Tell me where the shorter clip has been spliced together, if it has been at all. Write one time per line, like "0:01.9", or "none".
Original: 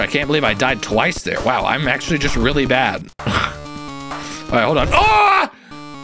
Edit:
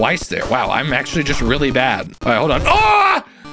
0:02.1